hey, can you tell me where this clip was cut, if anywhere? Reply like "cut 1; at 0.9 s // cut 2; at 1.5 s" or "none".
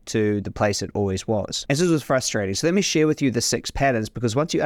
cut 1; at 1.5 s